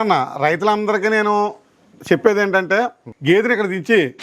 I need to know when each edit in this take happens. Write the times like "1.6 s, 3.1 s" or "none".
3.1 s